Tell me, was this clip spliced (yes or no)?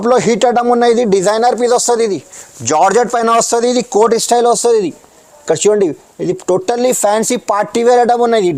no